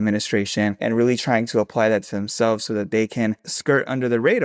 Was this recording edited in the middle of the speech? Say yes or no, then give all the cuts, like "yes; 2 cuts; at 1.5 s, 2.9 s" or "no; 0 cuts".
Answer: yes; 2 cuts; at 0.8 s, 3.5 s